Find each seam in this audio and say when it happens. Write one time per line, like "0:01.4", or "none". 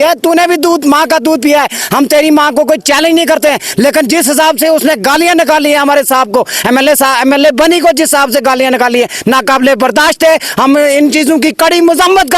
none